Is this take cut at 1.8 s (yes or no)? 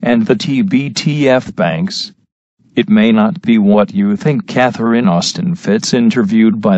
no